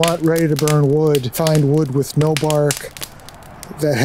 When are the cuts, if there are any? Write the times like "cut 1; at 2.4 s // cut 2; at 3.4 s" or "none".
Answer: cut 1; at 1.3 s

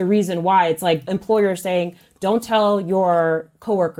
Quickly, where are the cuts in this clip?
cut 1; at 1.1 s

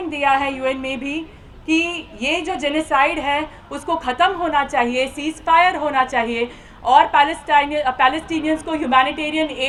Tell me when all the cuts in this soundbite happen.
none

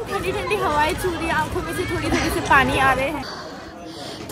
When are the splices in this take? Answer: cut 1; at 3.2 s

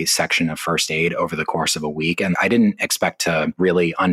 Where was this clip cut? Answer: cut 1; at 2.3 s

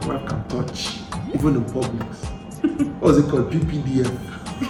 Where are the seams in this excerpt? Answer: none

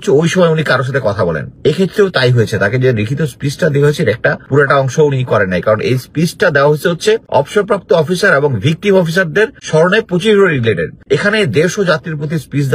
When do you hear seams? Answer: cut 1; at 1.5 s // cut 2; at 4.4 s // cut 3; at 7.2 s // cut 4; at 9.6 s // cut 5; at 10.9 s

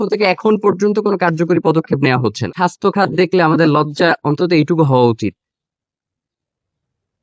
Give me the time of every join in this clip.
cut 1; at 2.5 s

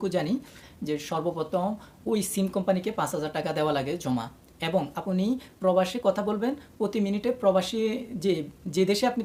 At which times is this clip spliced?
none

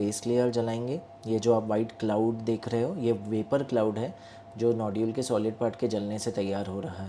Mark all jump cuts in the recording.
cut 1; at 1.1 s

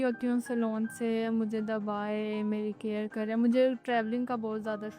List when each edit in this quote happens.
none

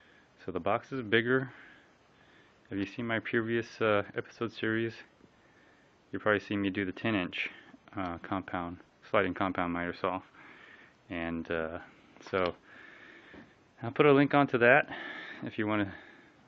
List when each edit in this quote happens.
none

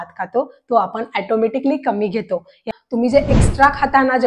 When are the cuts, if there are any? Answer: cut 1; at 2.6 s

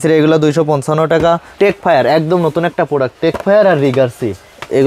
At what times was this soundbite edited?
cut 1; at 1.5 s

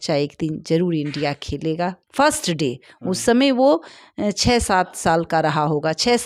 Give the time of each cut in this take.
none

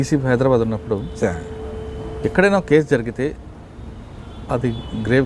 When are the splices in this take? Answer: none

